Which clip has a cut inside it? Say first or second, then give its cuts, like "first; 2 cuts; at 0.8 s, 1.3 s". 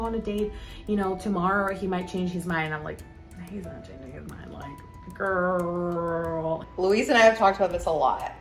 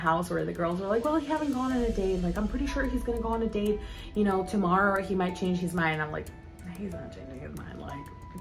first; 1 cut; at 6.7 s